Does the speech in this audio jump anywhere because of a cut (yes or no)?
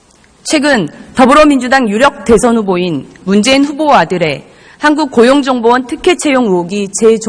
yes